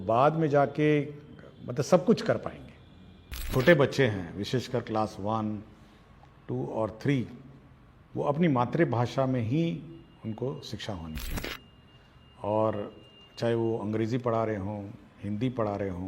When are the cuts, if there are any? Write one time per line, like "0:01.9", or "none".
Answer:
0:03.5